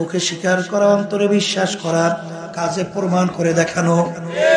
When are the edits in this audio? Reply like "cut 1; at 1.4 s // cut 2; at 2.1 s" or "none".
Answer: none